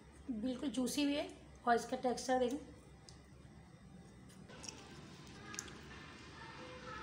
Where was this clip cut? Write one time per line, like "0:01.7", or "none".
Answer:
0:04.8